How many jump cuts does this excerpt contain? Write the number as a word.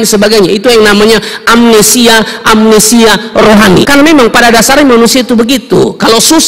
one